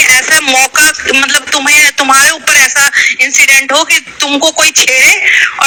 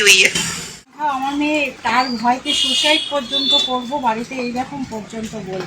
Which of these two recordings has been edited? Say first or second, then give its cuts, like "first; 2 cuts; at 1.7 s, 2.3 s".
second; 1 cut; at 0.9 s